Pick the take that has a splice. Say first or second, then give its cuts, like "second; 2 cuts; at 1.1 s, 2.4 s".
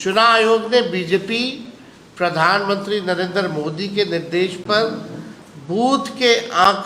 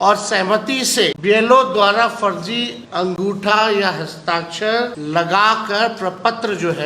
second; 3 cuts; at 1.2 s, 2.8 s, 5.0 s